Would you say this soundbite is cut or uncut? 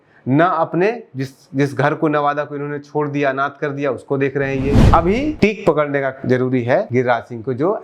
cut